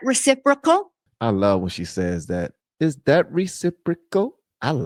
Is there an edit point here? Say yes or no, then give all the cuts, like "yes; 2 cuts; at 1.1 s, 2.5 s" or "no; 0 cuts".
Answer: no; 0 cuts